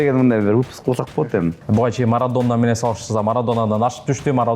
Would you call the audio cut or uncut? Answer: cut